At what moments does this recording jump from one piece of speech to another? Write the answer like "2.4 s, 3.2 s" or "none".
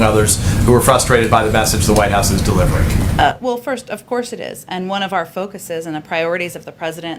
none